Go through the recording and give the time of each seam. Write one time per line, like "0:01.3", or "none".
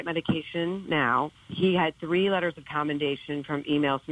0:01.3